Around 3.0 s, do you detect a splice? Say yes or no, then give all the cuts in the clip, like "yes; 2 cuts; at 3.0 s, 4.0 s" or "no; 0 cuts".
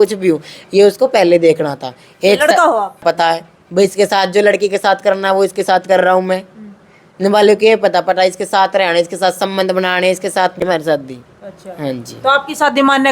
yes; 2 cuts; at 3.0 s, 10.6 s